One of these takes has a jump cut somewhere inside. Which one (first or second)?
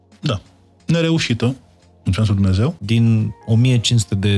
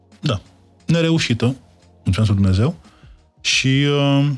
first